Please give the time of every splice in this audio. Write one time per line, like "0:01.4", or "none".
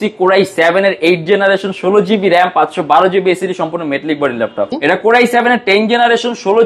0:04.7

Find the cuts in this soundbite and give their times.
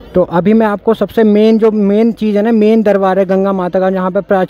none

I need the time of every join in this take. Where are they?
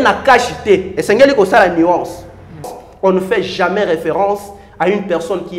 0:02.7

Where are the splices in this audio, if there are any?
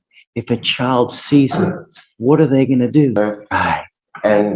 0:03.1

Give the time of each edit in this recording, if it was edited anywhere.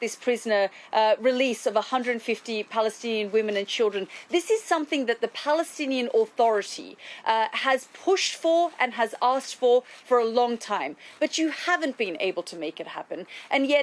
none

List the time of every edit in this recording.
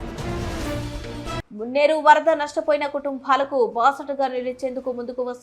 0:01.4

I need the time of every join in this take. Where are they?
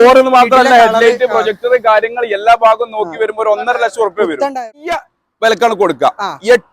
0:05.1

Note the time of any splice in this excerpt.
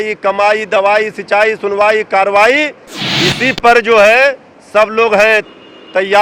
none

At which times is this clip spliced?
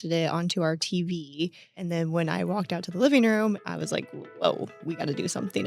0:01.8
0:03.6
0:04.8

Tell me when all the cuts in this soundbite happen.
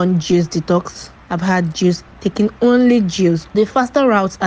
0:03.5

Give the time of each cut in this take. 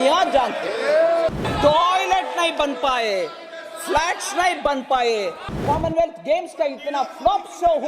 0:01.4
0:05.6

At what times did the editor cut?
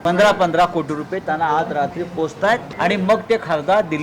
none

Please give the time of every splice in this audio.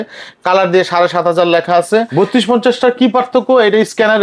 0:02.1

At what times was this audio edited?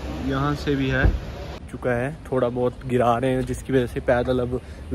0:01.6

